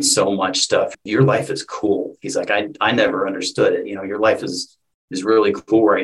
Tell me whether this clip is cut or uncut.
cut